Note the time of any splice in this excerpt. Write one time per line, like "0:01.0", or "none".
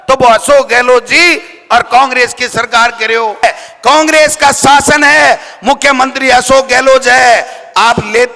0:03.4

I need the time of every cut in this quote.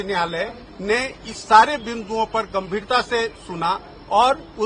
none

